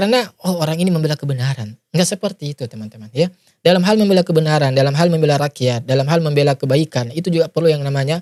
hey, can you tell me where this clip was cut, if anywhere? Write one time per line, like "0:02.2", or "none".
none

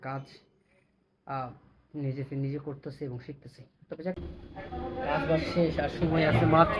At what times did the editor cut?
0:04.2

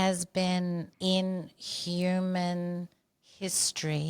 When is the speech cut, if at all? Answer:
0:00.9

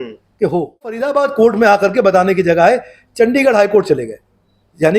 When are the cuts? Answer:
0:01.0

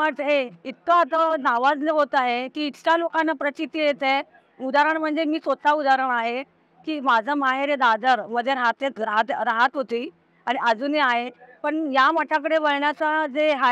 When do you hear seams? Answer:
none

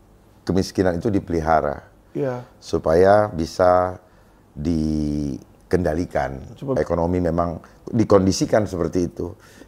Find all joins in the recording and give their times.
0:06.8

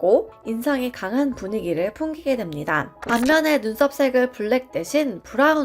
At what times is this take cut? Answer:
0:03.0

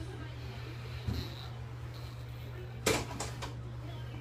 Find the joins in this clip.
none

